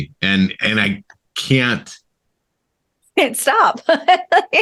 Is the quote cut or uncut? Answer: uncut